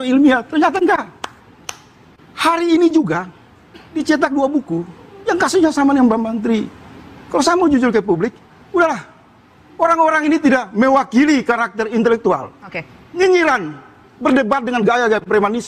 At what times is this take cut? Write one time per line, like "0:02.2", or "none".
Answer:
none